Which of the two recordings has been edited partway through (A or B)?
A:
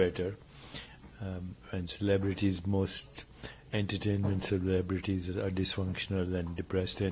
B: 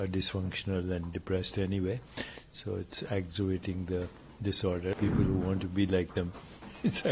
B